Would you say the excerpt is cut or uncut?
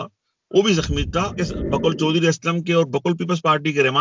cut